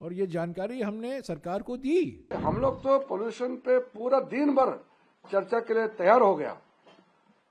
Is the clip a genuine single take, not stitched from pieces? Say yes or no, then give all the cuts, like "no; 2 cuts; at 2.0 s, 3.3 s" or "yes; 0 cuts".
no; 1 cut; at 2.3 s